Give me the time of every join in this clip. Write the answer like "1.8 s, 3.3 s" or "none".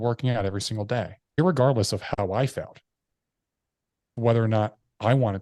1.4 s, 4.1 s